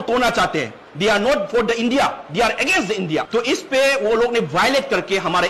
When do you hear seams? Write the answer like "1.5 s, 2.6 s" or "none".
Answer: 3.3 s